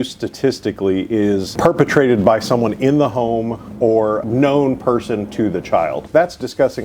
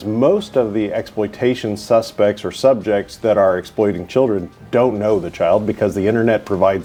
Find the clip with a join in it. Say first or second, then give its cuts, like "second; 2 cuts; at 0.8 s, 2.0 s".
first; 3 cuts; at 1.5 s, 4.2 s, 6.0 s